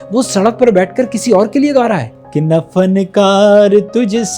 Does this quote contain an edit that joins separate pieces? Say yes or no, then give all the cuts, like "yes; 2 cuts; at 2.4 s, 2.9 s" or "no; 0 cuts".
yes; 1 cut; at 2.2 s